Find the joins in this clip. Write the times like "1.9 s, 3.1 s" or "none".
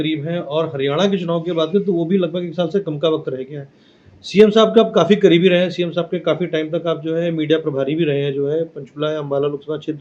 none